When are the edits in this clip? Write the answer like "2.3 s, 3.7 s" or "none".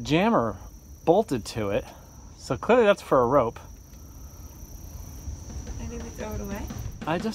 none

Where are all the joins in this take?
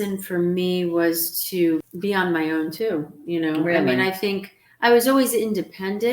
1.9 s

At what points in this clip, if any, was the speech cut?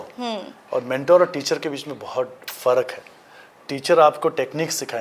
none

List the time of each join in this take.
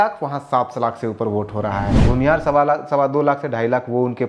2.1 s

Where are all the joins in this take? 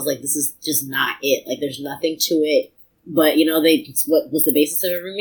none

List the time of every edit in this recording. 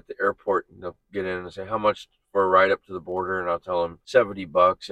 4.0 s

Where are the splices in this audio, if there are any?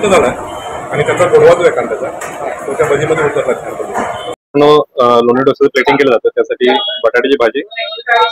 4.3 s

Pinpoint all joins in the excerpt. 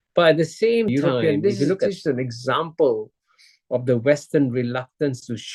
0.9 s

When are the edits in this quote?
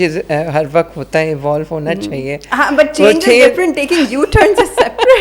none

